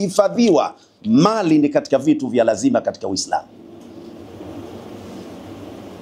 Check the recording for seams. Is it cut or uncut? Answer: uncut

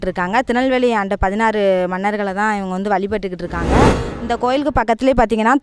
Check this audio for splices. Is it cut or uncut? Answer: cut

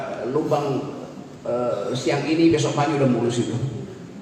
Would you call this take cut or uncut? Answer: uncut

